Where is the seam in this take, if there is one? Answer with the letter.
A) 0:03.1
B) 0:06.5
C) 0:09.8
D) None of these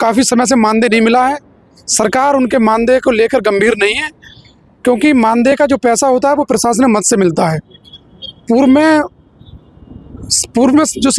D